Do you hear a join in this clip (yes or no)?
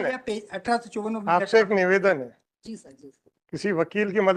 no